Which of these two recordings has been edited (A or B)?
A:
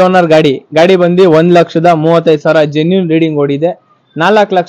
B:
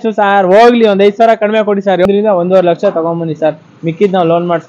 B